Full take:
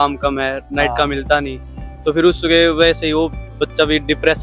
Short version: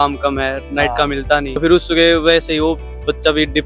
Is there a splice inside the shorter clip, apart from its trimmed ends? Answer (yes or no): yes